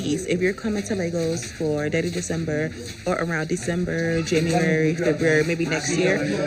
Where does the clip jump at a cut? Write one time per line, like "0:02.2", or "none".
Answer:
none